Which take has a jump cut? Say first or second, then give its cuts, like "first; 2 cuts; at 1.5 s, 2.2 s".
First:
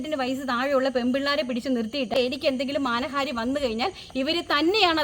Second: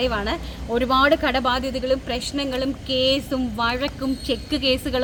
first; 1 cut; at 2.1 s